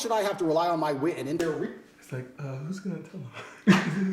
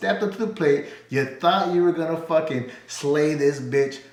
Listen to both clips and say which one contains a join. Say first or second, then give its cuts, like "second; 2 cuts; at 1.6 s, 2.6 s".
first; 1 cut; at 1.4 s